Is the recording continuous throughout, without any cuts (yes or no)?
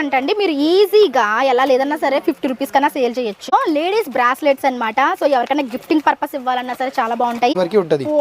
no